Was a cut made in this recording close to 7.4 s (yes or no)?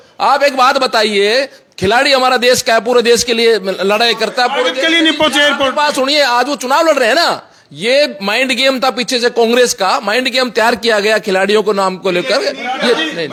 no